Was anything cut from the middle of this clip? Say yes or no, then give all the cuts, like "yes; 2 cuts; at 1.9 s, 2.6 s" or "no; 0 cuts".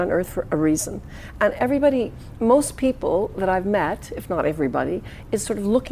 no; 0 cuts